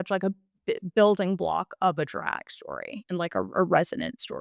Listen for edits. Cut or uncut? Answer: cut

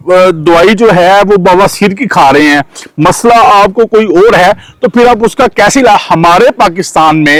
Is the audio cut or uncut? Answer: uncut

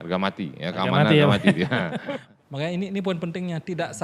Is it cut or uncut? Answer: cut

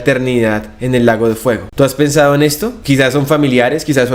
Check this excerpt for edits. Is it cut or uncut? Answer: cut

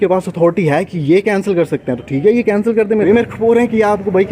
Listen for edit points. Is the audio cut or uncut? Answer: cut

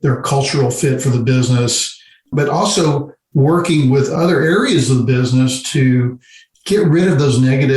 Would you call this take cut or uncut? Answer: cut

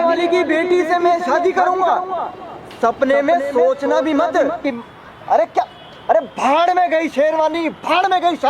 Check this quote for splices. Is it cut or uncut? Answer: cut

